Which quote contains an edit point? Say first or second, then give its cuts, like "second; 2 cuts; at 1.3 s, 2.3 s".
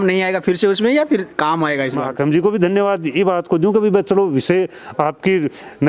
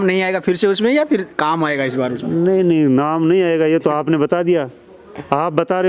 first; 1 cut; at 2.1 s